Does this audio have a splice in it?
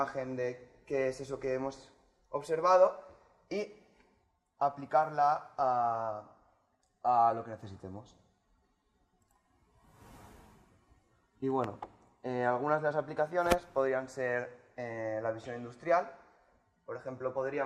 no; 0 cuts

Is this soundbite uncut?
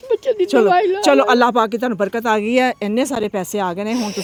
yes; 0 cuts

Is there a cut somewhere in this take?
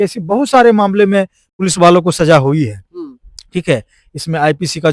no; 0 cuts

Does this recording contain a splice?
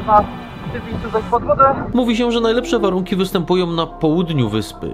yes; 1 cut; at 1.8 s

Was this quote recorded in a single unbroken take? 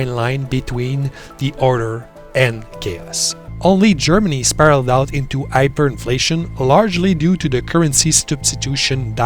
no; 1 cut; at 3.4 s

